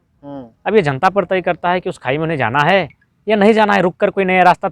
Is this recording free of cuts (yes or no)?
yes